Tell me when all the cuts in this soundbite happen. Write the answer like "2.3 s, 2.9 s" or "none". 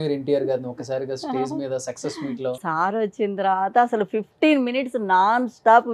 2.6 s